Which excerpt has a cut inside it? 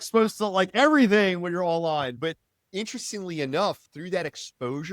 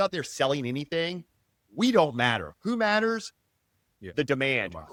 first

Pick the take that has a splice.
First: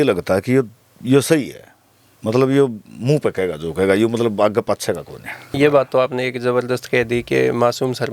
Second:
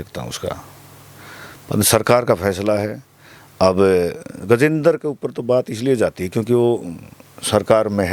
first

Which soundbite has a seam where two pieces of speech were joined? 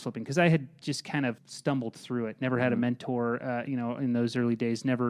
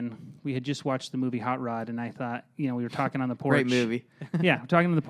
first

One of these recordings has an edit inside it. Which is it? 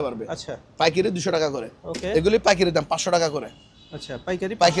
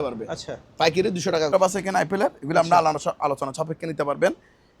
second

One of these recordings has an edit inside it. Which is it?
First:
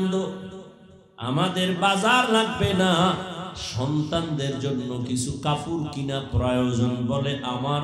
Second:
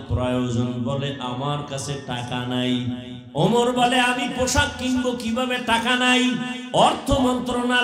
second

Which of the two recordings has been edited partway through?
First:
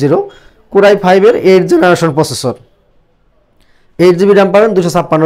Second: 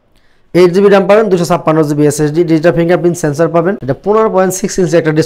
second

